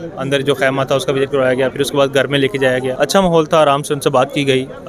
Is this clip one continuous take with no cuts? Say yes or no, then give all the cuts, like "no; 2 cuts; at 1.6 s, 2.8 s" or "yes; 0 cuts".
no; 1 cut; at 2.9 s